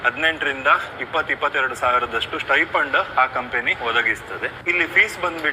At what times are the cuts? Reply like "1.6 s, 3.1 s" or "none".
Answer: 4.6 s